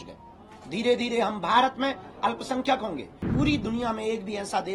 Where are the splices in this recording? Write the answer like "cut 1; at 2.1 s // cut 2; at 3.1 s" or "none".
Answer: cut 1; at 3.3 s